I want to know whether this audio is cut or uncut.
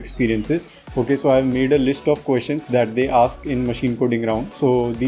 uncut